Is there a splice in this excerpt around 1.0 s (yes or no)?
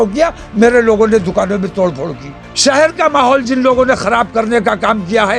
no